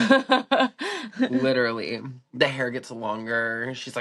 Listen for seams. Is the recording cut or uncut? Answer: uncut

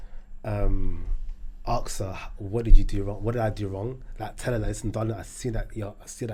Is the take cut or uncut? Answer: uncut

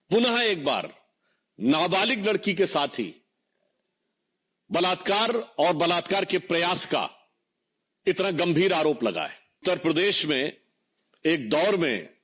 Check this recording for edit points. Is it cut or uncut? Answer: cut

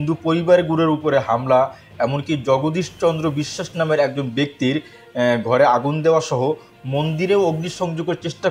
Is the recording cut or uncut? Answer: uncut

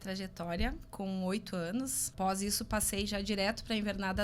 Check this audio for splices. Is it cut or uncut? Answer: cut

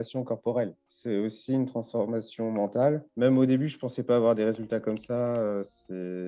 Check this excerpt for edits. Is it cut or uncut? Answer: uncut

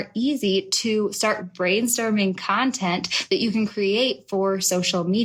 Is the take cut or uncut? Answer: uncut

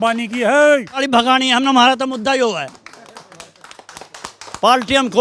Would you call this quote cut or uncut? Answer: cut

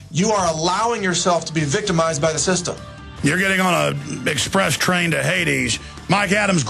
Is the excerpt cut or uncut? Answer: cut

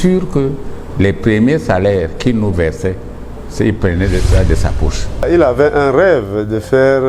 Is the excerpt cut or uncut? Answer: cut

